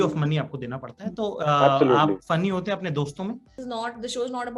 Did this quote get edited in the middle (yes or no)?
yes